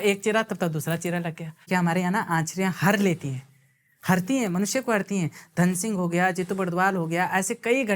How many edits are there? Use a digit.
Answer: 1